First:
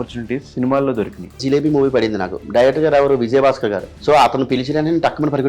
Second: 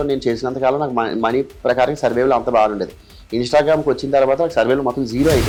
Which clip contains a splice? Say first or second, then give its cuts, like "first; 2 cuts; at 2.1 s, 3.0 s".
first; 2 cuts; at 1.4 s, 3.9 s